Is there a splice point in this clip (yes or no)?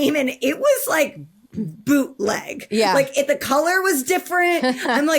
no